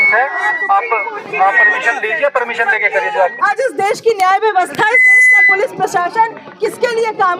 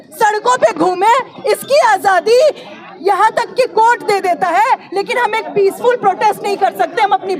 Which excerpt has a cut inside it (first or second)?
first